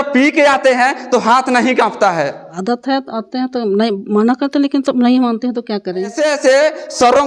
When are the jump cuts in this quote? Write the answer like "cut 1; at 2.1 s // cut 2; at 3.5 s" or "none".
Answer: cut 1; at 2.5 s // cut 2; at 6.1 s